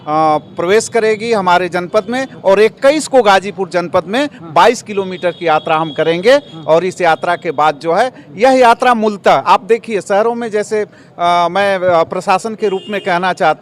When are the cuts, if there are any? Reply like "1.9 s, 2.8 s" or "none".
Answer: none